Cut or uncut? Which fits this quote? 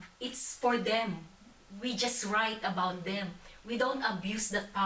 uncut